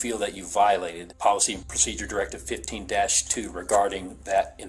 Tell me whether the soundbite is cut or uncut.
cut